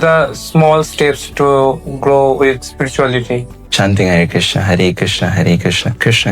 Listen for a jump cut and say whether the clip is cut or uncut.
cut